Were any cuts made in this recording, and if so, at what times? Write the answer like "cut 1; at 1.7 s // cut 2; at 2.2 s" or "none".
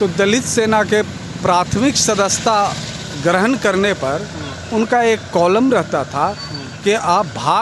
none